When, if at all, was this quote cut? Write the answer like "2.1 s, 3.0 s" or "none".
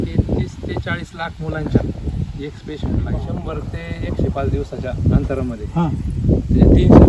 3.3 s